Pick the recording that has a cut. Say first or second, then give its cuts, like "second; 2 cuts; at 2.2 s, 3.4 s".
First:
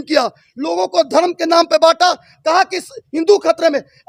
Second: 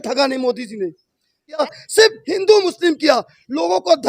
second; 1 cut; at 1.6 s